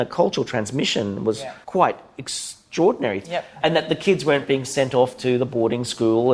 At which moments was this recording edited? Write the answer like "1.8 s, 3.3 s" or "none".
1.5 s, 3.3 s